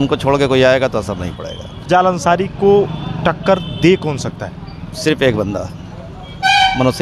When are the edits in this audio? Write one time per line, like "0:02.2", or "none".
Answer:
0:01.8